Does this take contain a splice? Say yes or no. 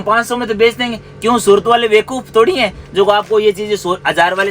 no